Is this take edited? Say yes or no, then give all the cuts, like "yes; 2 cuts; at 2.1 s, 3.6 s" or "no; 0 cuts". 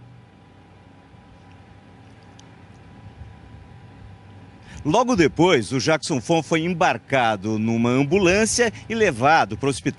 yes; 1 cut; at 5.2 s